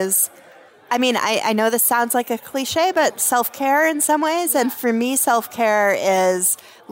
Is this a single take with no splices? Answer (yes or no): yes